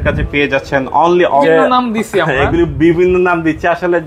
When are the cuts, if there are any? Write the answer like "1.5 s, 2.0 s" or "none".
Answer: 1.4 s